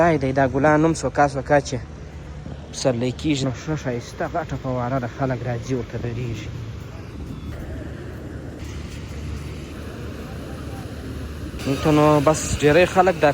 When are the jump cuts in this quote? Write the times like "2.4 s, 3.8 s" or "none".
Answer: 3.4 s, 7.5 s, 8.6 s, 9.7 s